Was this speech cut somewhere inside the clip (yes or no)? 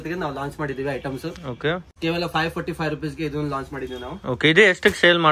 no